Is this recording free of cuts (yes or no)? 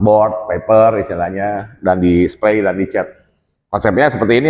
yes